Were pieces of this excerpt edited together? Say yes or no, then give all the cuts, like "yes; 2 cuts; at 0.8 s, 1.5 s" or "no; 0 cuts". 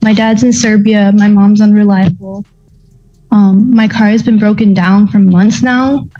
no; 0 cuts